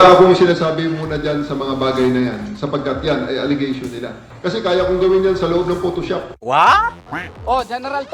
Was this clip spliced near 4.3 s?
yes; 3 cuts; at 4.3 s, 6.3 s, 7.2 s

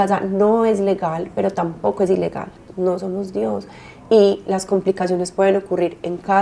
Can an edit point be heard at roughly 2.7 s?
yes; 1 cut; at 2.7 s

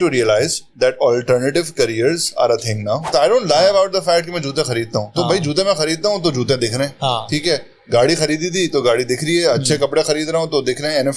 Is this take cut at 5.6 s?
no; 1 cut; at 3.0 s

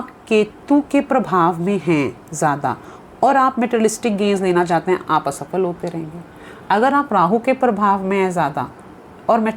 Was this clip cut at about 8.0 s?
no; 0 cuts

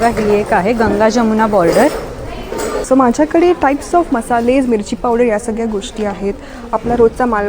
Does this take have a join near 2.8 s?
yes; 1 cut; at 2.8 s

